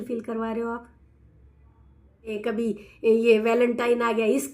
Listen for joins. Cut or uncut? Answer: cut